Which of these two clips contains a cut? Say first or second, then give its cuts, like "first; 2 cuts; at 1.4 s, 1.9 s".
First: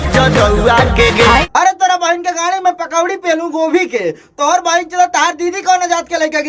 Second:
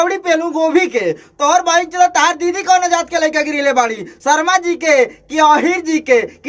first; 1 cut; at 1.5 s